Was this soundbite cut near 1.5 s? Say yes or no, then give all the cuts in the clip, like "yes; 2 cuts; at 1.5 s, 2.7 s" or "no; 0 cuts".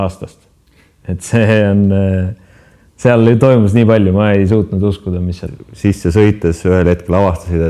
no; 1 cut; at 5.4 s